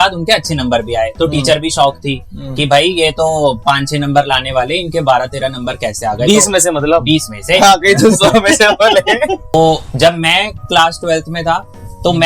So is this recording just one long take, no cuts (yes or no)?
no